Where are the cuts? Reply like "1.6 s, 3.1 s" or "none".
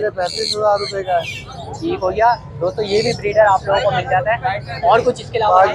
none